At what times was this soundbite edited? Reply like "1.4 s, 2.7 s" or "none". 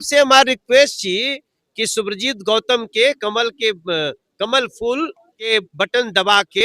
5.5 s